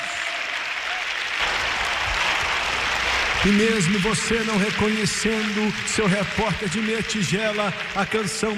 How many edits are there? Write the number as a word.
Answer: one